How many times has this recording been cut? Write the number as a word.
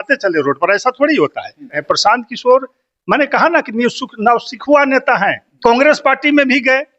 two